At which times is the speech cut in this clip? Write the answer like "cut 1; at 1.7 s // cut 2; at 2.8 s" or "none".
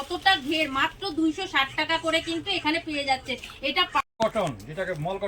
cut 1; at 4.0 s

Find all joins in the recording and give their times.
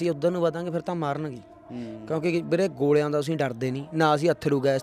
none

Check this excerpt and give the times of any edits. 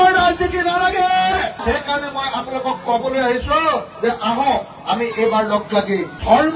cut 1; at 1.6 s

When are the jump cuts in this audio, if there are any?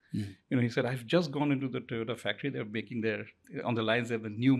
none

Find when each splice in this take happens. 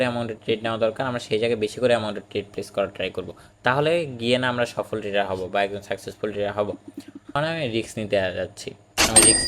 cut 1; at 7.3 s

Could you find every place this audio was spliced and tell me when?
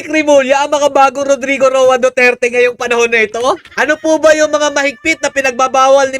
cut 1; at 3.7 s

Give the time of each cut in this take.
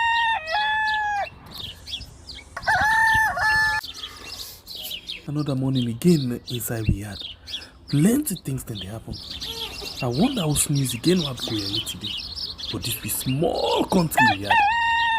cut 1; at 0.9 s

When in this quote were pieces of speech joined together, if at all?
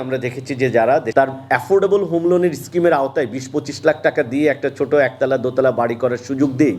cut 1; at 1.1 s

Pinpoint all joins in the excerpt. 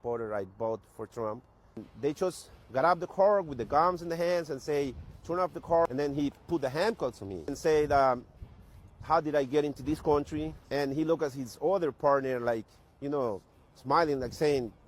cut 1; at 1.9 s // cut 2; at 5.9 s // cut 3; at 7.6 s // cut 4; at 10.6 s

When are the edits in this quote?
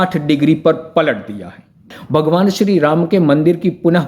cut 1; at 1.9 s

